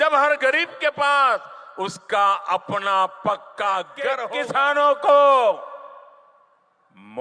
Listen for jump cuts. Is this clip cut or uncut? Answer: cut